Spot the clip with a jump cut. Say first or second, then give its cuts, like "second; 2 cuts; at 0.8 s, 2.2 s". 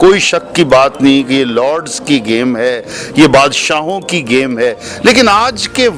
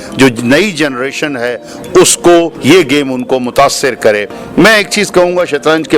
second; 1 cut; at 2.5 s